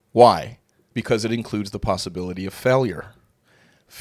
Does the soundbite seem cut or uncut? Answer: uncut